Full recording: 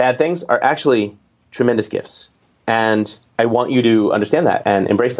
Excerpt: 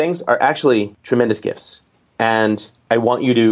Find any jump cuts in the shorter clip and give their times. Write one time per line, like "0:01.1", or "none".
0:01.0